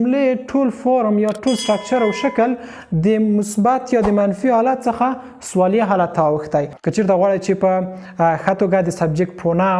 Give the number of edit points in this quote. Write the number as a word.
one